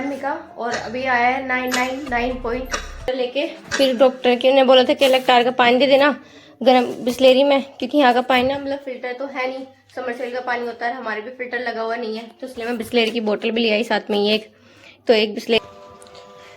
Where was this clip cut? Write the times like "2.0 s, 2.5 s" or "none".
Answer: 3.1 s, 15.6 s